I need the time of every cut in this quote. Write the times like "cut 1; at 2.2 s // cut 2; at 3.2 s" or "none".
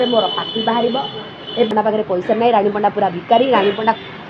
cut 1; at 1.7 s